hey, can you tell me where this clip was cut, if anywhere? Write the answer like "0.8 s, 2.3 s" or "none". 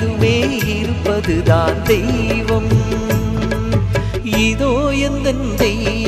none

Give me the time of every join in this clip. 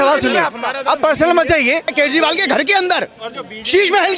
1.9 s

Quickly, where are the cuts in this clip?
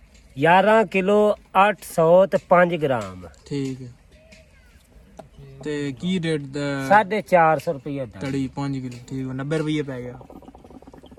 none

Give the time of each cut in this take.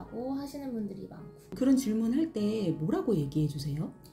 1.5 s

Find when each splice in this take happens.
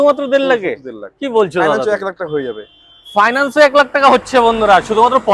none

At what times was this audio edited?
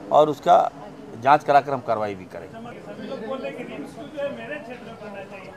2.7 s

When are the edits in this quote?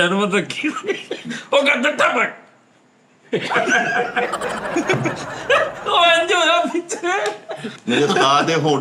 7.7 s

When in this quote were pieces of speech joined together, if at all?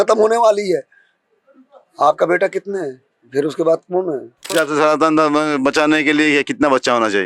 4.5 s

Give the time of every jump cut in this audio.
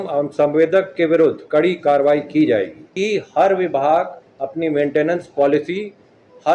2.8 s, 4.3 s

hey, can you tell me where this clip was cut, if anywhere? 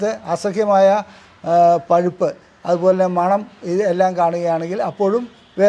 none

